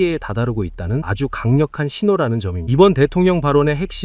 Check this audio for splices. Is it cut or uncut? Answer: cut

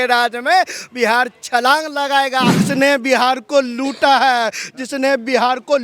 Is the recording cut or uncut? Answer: cut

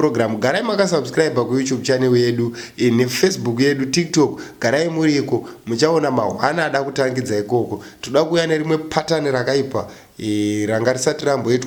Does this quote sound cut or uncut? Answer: uncut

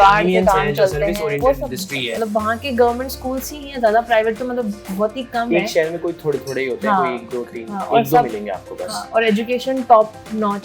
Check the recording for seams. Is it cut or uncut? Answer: cut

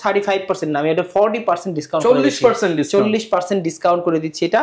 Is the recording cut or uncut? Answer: uncut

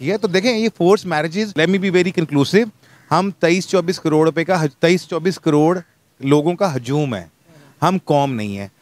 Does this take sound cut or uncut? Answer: cut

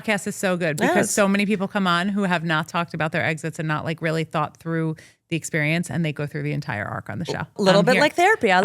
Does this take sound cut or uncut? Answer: cut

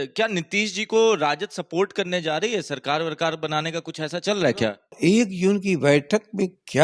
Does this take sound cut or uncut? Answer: cut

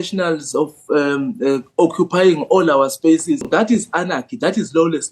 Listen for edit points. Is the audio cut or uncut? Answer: cut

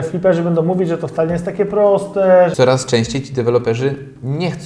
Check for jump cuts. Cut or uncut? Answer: cut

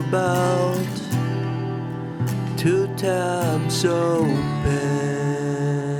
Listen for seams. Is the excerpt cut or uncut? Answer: uncut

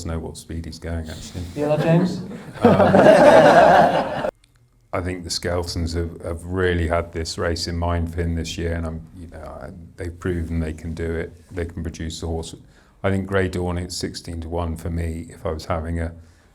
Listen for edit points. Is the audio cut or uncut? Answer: cut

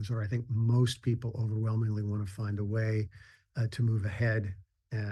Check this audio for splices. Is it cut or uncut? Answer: uncut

